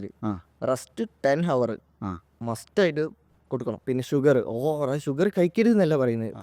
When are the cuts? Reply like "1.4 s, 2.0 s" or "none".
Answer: 3.8 s